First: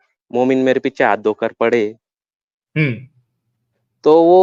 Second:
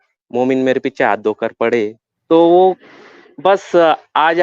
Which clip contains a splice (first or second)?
second